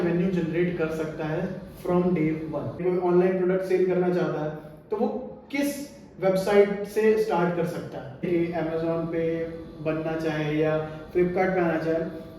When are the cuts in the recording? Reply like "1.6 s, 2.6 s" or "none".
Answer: 2.8 s, 8.2 s